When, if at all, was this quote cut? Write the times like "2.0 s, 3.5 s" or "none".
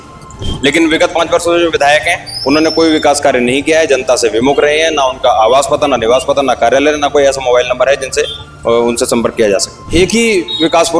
9.8 s